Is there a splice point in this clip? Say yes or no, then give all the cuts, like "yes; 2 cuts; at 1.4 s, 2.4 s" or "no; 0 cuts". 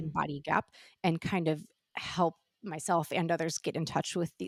no; 0 cuts